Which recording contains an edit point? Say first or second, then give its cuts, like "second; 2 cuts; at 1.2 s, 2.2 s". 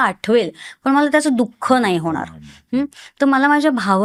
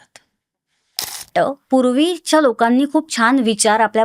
second; 1 cut; at 1.3 s